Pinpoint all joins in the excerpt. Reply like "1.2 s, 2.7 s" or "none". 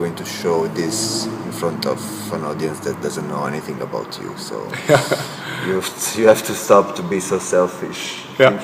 4.5 s